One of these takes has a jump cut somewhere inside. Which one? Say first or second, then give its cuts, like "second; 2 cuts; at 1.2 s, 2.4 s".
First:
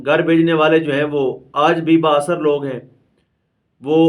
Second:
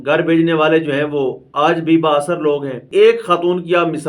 second; 1 cut; at 2.8 s